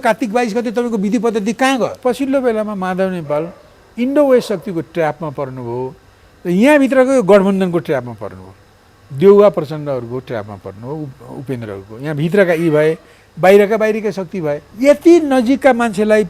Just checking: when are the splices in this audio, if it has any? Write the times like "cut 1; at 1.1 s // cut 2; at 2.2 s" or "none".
cut 1; at 2.0 s // cut 2; at 14.6 s